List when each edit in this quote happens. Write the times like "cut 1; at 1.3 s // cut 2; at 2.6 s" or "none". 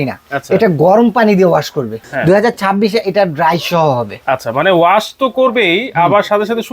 cut 1; at 2.0 s